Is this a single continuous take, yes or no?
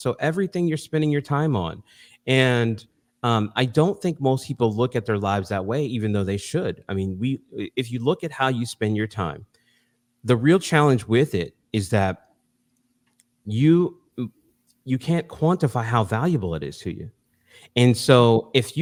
yes